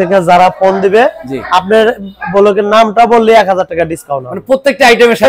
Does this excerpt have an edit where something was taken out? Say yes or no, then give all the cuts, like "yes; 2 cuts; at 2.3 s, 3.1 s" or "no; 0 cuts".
no; 0 cuts